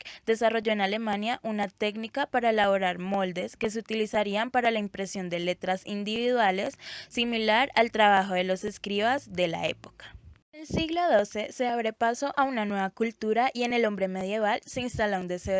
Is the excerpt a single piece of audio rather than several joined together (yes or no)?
no